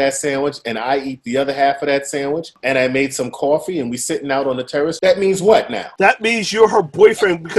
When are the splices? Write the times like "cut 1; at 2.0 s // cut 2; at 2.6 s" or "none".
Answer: cut 1; at 2.5 s // cut 2; at 5.0 s // cut 3; at 5.8 s